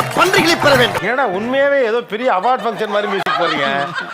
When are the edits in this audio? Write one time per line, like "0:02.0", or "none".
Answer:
0:01.0